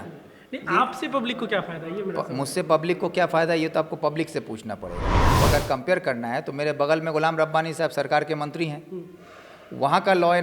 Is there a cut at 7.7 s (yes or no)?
no